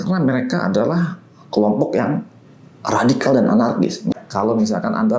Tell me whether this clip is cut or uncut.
cut